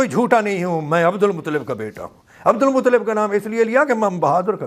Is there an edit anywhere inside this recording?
no; 0 cuts

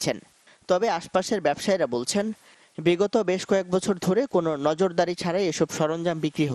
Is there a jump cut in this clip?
yes; 1 cut; at 4.1 s

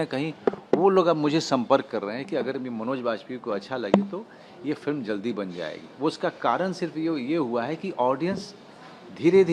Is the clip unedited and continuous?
yes; 0 cuts

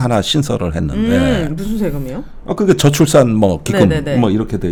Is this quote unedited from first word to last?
yes; 0 cuts

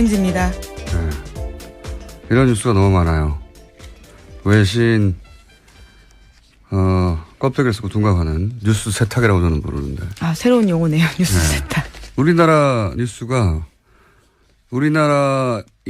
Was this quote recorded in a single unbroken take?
no; 1 cut; at 10.4 s

